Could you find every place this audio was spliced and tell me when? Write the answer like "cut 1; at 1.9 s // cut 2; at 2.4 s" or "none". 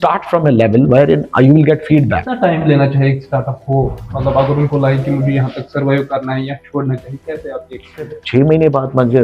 cut 1; at 2.3 s // cut 2; at 8.2 s